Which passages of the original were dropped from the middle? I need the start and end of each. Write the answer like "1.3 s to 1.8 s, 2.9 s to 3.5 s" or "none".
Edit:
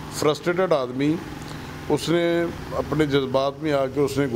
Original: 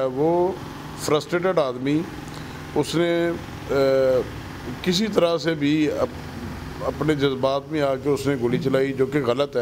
3.5 s to 6.7 s